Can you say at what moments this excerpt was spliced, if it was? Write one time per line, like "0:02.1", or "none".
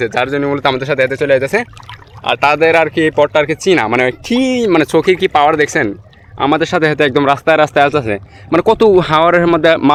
none